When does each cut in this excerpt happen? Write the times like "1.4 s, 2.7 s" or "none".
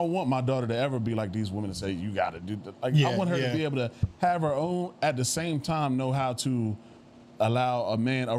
none